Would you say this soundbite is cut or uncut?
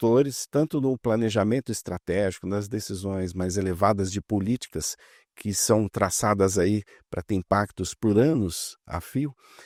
uncut